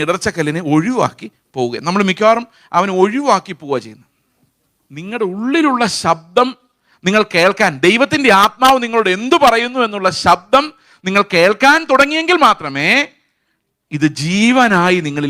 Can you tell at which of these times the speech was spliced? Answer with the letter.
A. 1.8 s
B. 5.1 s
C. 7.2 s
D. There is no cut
B